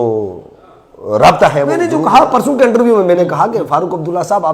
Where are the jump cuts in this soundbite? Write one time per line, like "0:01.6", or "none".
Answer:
0:02.0

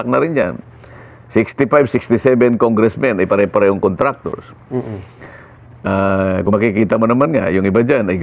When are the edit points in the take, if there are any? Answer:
none

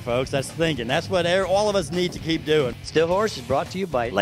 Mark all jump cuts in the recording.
0:02.8

